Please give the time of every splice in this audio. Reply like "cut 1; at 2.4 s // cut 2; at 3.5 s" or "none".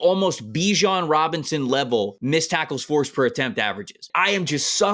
cut 1; at 2.2 s // cut 2; at 4.1 s